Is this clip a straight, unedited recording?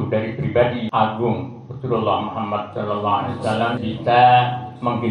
no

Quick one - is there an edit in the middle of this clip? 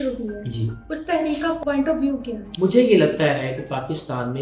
yes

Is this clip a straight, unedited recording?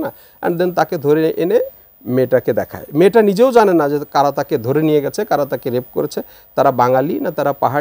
yes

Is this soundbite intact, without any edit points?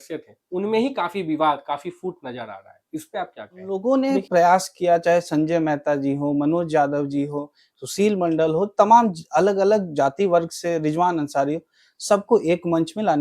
no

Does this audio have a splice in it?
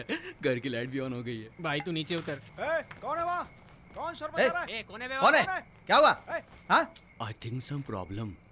yes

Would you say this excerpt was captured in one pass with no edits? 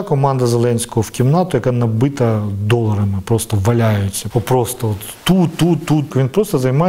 no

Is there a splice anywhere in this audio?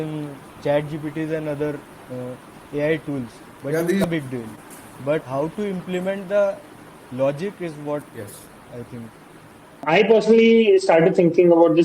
yes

